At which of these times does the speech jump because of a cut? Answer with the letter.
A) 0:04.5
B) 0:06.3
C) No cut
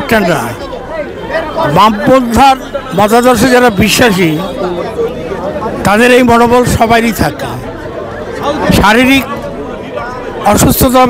C